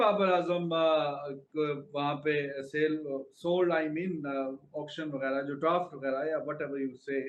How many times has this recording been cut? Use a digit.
0